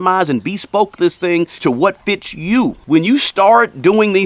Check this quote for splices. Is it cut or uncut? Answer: cut